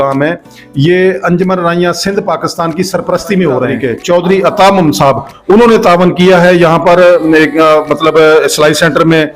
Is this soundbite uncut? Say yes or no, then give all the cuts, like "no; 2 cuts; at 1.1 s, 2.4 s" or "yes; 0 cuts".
no; 1 cut; at 3.9 s